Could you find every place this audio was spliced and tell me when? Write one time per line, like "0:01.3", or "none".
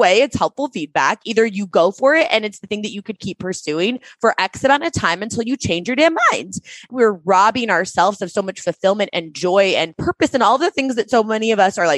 0:06.8
0:10.0